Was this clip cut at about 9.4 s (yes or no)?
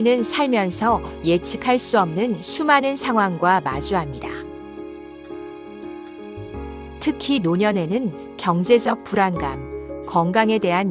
no